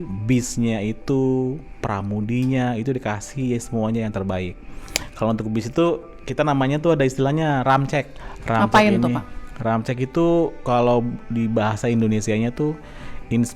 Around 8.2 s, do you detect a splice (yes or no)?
yes